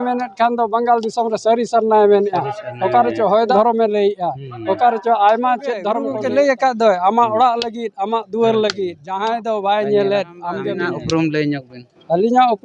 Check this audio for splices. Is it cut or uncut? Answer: cut